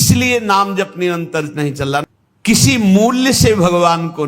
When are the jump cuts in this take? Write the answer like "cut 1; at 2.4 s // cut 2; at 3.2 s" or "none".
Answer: cut 1; at 2.0 s